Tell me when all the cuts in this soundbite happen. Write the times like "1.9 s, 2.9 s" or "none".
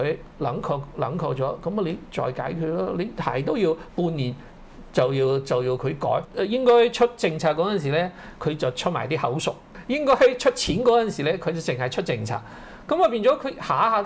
6.2 s, 9.7 s